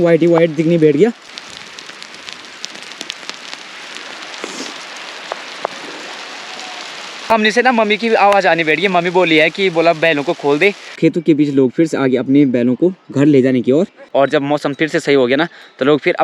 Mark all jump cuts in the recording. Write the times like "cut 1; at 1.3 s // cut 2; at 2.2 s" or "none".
cut 1; at 1.3 s // cut 2; at 7.3 s // cut 3; at 11.0 s // cut 4; at 14.0 s